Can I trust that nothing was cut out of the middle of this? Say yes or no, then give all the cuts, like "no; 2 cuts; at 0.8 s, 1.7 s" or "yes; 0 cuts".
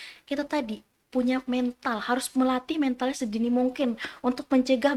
yes; 0 cuts